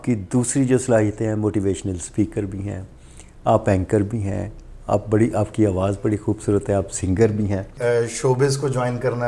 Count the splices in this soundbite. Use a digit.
1